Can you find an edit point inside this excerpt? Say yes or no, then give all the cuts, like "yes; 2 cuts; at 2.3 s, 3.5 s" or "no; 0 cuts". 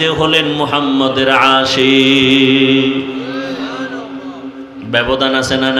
no; 0 cuts